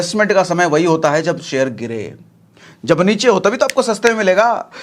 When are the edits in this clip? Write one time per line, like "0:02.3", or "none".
none